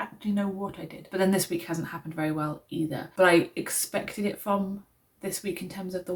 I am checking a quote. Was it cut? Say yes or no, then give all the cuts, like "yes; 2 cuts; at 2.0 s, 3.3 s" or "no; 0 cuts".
no; 0 cuts